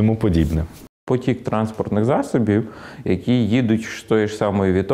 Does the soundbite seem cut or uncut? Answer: cut